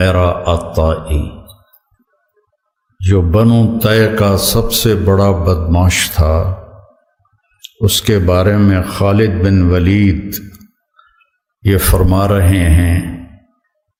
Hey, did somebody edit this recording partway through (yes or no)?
no